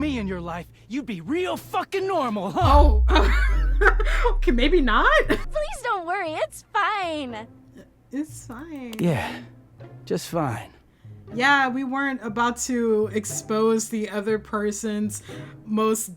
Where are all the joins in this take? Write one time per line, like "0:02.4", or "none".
0:05.5